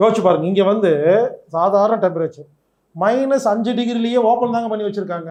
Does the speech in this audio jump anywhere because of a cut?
no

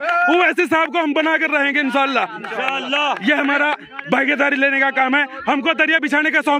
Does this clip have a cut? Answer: no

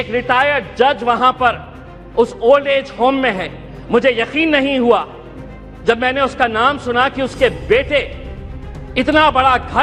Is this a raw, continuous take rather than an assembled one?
yes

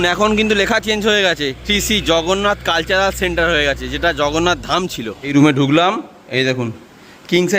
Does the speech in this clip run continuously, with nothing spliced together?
no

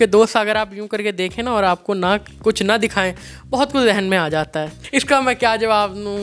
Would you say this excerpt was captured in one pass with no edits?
no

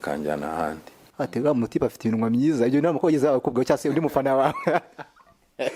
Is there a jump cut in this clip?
yes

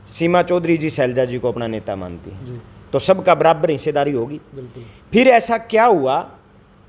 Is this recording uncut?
yes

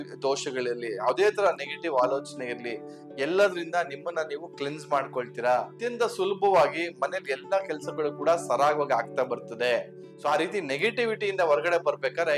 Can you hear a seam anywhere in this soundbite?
yes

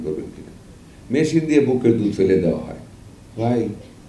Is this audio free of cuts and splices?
yes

